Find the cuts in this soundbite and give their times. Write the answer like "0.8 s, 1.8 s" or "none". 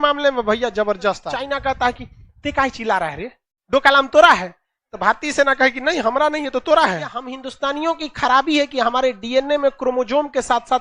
1.6 s, 7.4 s